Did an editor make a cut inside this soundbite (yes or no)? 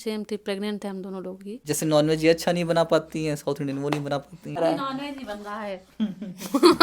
yes